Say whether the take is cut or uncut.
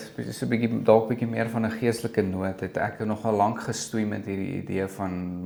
uncut